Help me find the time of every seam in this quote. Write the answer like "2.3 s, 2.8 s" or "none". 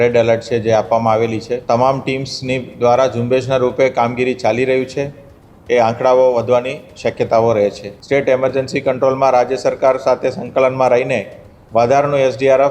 1.6 s, 7.9 s